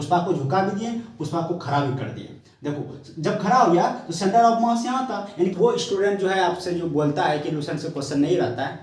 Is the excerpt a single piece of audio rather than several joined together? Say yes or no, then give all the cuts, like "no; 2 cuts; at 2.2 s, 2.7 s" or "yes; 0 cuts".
no; 1 cut; at 5.5 s